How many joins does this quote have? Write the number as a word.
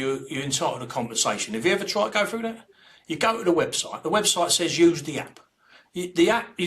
zero